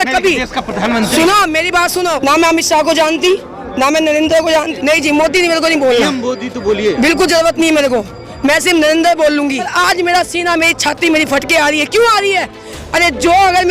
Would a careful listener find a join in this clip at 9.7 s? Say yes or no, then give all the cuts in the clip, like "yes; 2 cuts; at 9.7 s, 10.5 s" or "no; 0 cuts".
yes; 3 cuts; at 2.2 s, 4.7 s, 9.7 s